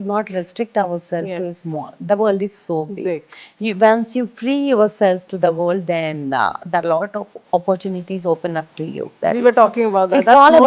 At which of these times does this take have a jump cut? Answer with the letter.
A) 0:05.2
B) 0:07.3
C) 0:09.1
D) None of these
C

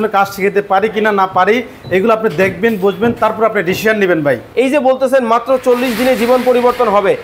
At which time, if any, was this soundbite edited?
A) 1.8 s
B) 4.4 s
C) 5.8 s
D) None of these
B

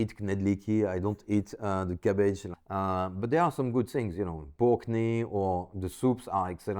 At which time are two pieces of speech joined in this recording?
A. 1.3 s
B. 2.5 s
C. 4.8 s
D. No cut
B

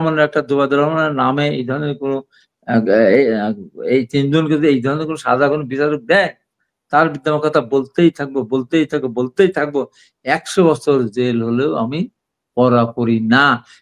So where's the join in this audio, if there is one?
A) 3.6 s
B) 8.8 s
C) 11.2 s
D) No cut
D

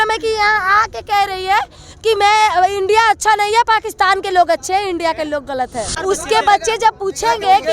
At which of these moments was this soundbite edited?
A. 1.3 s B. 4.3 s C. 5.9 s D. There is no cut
C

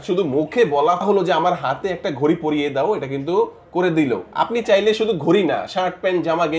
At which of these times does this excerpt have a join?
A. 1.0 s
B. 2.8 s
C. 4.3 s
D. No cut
A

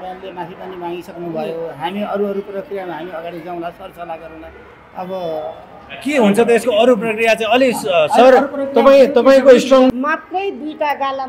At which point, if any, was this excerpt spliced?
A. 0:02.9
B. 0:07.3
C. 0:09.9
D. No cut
C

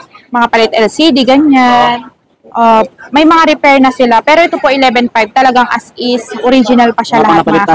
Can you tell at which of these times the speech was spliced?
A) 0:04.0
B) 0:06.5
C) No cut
C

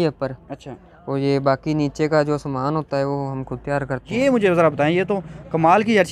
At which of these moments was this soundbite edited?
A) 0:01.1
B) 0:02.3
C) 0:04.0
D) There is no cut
C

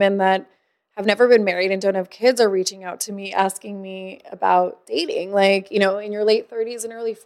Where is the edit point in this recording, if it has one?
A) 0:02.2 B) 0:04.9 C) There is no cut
C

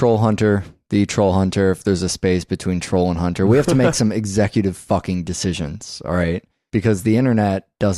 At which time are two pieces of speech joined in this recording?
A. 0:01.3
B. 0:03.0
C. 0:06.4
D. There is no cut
C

